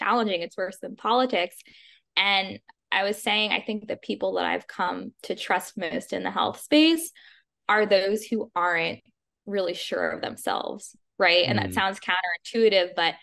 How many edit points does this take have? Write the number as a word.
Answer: zero